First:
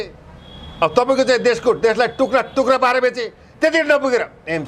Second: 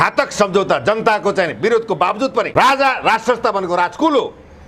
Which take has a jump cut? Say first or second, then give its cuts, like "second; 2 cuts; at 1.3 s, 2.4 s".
second; 1 cut; at 2.5 s